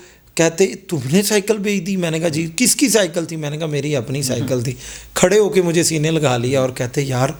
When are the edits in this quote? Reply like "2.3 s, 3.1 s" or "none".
none